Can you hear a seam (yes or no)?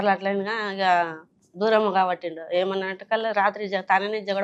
no